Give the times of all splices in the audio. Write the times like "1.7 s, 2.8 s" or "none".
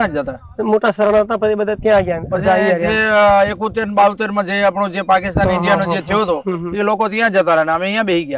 none